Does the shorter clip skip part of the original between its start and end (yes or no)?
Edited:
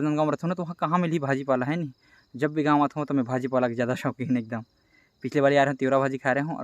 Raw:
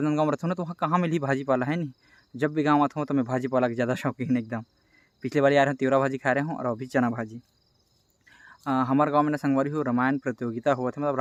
no